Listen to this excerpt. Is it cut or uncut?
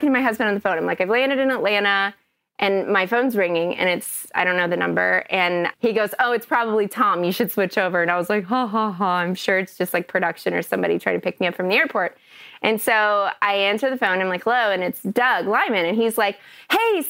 cut